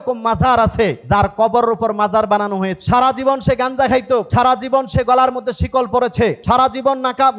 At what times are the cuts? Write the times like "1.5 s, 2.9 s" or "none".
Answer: 1.0 s, 2.8 s, 4.3 s, 6.4 s